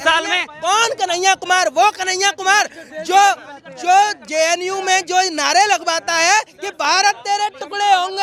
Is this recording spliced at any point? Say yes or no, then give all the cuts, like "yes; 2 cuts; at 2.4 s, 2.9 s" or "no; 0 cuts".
no; 0 cuts